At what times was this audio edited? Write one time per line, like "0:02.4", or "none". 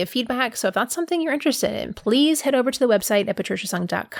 none